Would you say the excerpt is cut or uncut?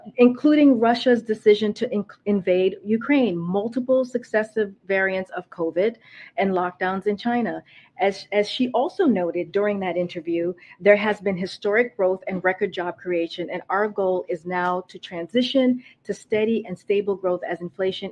uncut